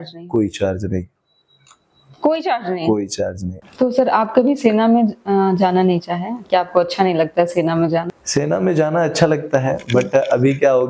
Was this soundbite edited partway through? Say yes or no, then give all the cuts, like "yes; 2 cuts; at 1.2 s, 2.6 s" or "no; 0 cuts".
yes; 2 cuts; at 3.5 s, 8.2 s